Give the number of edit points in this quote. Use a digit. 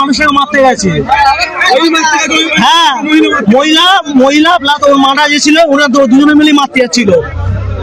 0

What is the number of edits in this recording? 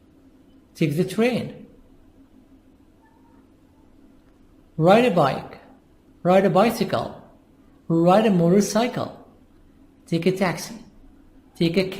1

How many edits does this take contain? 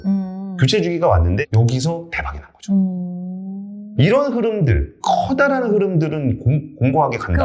1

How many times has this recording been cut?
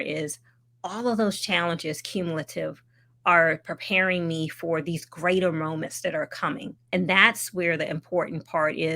1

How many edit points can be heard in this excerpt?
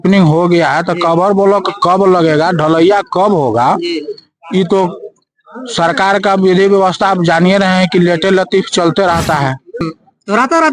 1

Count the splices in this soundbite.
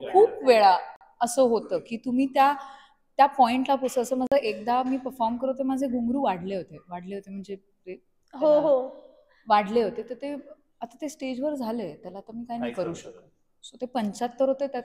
0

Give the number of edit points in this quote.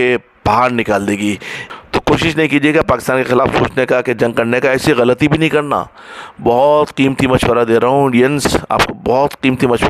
1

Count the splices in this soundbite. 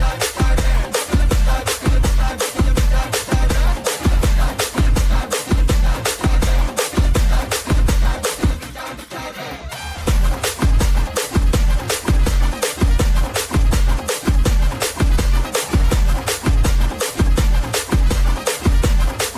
1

